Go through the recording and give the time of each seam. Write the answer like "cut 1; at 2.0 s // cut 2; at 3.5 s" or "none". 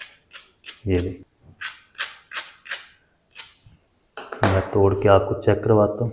cut 1; at 1.2 s